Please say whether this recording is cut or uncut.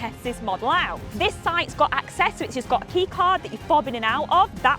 cut